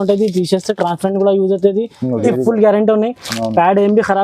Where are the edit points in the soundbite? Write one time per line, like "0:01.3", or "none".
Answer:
0:02.2

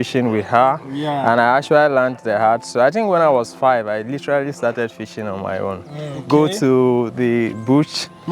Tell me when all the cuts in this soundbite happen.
none

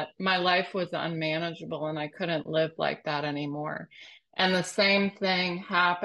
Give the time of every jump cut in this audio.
none

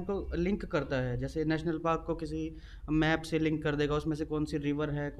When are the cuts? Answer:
none

